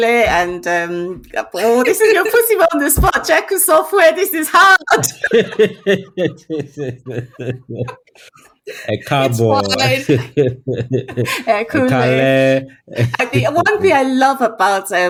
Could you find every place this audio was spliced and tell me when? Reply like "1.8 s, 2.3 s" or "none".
none